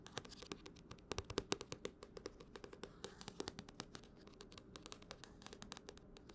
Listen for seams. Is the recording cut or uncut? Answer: uncut